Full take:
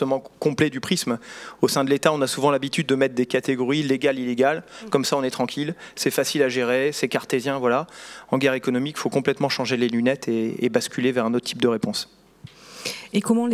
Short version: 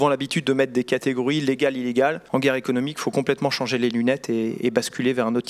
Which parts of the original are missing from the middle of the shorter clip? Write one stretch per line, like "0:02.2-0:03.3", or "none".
0:04.6-0:08.2